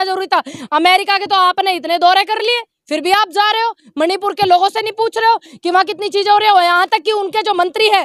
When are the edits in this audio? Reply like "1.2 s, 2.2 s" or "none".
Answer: none